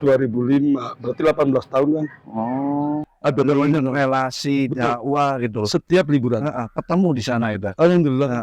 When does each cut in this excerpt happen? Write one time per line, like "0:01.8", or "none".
0:03.1